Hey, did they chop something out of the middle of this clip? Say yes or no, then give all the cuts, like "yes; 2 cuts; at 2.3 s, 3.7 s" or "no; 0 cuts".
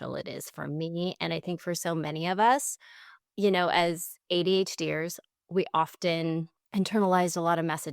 yes; 1 cut; at 6.6 s